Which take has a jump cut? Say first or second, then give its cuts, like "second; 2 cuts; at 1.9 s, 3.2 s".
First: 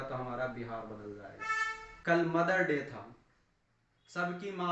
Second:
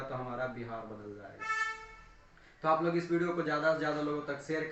first; 1 cut; at 1.9 s